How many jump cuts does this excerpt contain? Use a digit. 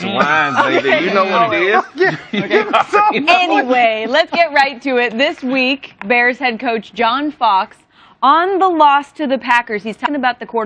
1